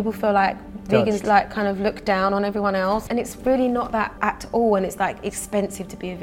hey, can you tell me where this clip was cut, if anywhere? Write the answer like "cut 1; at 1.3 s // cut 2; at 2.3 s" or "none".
cut 1; at 3.0 s // cut 2; at 4.1 s